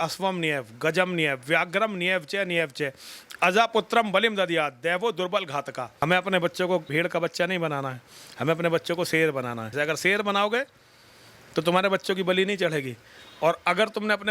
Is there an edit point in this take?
yes; 3 cuts; at 6.0 s, 6.9 s, 9.7 s

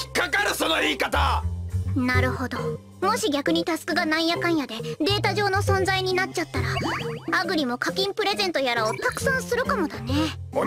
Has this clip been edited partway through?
yes; 1 cut; at 9.2 s

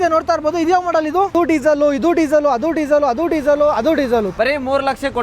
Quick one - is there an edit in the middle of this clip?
yes; 2 cuts; at 1.3 s, 4.3 s

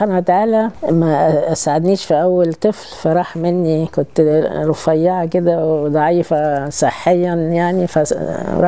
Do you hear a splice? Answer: no; 0 cuts

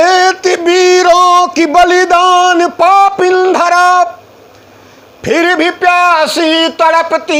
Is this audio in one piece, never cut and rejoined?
yes; 0 cuts

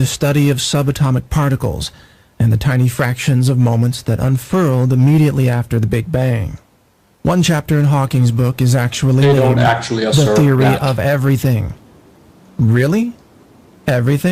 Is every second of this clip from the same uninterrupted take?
yes; 0 cuts

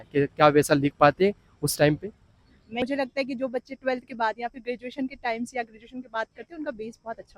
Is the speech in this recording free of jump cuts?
no; 1 cut; at 2.8 s

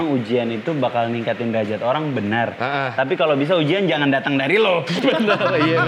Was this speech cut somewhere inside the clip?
yes; 1 cut; at 4.9 s

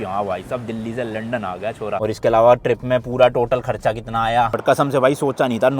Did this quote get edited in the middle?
yes; 2 cuts; at 2.0 s, 4.5 s

